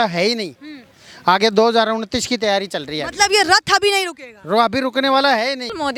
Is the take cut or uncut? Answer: uncut